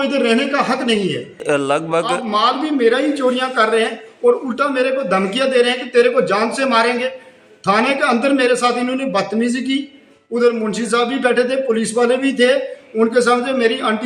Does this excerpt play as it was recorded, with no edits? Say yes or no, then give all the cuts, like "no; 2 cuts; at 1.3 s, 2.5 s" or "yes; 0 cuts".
no; 1 cut; at 1.4 s